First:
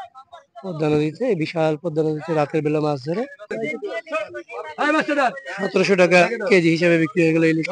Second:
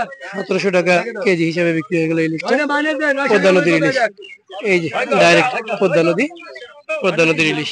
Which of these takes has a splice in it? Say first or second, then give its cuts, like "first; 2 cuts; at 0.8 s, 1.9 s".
first; 1 cut; at 3.5 s